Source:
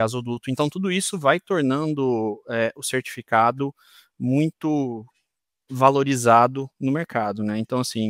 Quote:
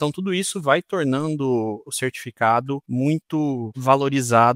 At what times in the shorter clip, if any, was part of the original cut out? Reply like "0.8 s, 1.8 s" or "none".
1.9 s, 2.8 s, 3.7 s

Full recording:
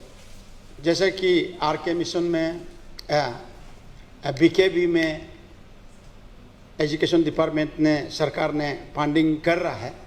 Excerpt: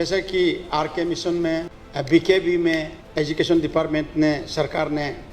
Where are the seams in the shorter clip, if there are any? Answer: 1.8 s, 3.0 s

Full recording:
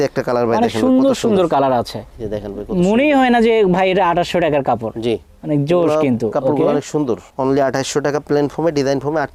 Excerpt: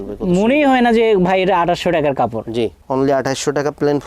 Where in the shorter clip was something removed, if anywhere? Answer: 2.8 s

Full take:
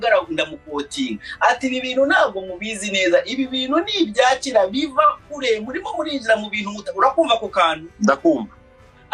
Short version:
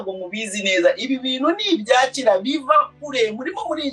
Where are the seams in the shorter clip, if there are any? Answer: none

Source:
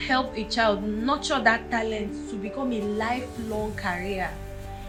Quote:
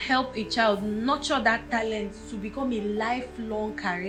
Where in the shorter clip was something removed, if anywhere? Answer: none

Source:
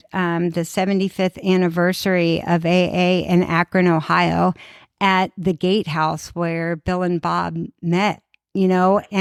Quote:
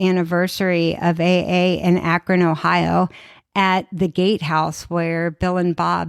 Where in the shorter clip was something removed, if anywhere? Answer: none

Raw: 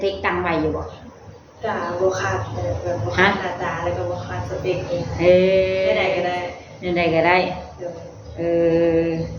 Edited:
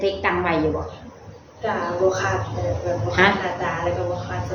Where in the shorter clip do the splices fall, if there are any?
none

